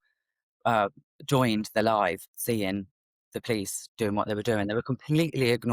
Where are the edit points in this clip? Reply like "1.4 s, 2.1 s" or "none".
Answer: none